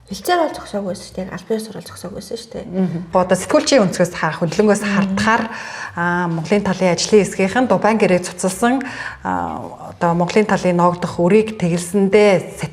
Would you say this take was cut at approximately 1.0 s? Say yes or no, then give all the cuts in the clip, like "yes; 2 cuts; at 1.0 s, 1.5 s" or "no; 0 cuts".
no; 1 cut; at 3.1 s